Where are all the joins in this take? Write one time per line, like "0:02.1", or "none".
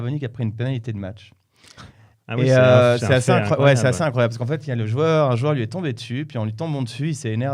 none